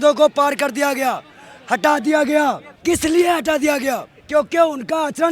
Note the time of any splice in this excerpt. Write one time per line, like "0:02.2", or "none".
0:02.7
0:04.1